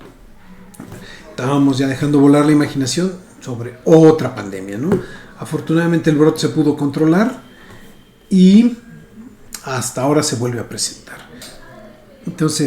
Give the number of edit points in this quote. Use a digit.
1